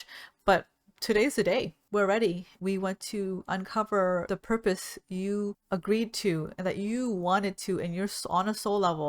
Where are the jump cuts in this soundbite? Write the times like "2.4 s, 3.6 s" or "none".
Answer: 1.8 s, 2.5 s, 4.2 s, 5.6 s